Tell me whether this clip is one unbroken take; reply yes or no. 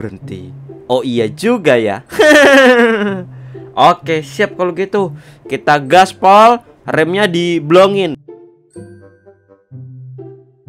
no